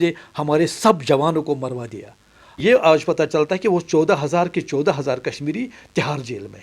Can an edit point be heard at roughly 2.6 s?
yes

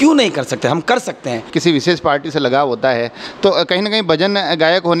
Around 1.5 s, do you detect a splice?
yes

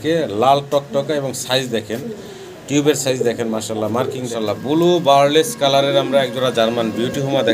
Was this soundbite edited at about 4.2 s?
yes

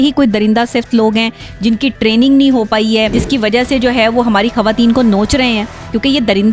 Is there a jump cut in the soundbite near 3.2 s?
yes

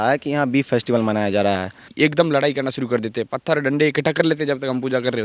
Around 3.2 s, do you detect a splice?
no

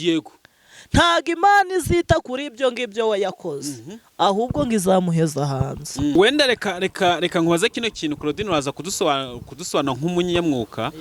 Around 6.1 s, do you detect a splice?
yes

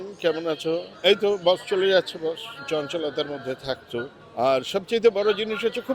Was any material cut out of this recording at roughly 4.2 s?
yes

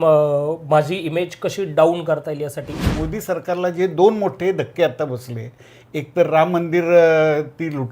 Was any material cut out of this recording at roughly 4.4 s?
no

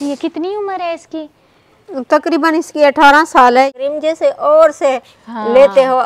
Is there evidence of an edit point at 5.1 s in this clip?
no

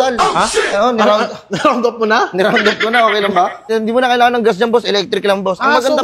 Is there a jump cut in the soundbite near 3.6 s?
yes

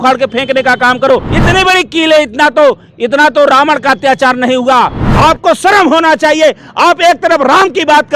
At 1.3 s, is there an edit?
yes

